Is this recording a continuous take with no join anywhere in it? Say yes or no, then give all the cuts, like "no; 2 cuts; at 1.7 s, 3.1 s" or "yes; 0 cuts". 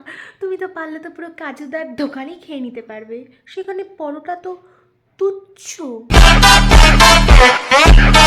yes; 0 cuts